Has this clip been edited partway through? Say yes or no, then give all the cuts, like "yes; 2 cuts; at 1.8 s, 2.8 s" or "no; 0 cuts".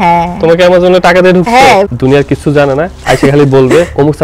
yes; 1 cut; at 1.9 s